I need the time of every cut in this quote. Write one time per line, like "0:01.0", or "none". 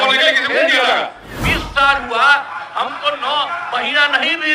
0:01.4